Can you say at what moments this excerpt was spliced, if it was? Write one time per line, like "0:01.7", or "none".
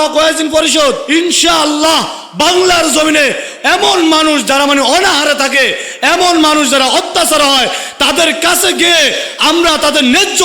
0:01.0
0:03.5